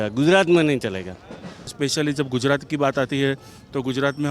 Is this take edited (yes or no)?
yes